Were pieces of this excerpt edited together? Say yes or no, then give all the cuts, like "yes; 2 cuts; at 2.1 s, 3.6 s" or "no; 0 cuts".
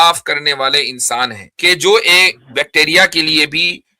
yes; 1 cut; at 1.5 s